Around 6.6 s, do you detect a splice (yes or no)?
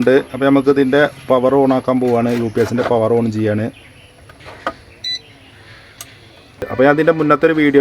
yes